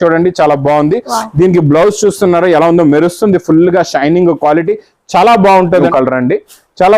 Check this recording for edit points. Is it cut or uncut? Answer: cut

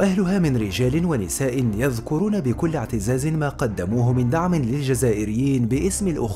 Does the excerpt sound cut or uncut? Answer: uncut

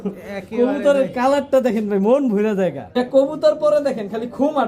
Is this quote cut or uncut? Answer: cut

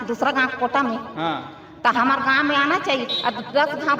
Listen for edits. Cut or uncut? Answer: uncut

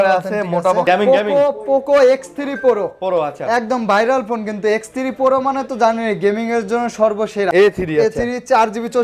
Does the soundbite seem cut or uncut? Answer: cut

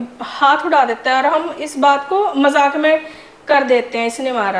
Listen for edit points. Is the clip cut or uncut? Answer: uncut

